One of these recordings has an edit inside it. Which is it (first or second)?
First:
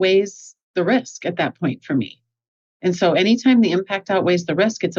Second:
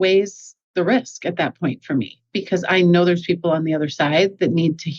second